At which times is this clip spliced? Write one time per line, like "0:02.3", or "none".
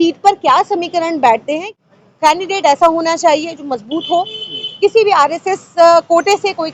0:01.7